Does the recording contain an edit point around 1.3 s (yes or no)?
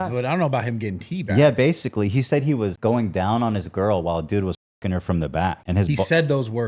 no